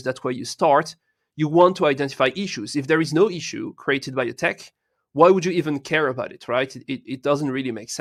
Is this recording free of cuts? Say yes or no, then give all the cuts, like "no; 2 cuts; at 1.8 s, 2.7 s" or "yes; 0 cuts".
yes; 0 cuts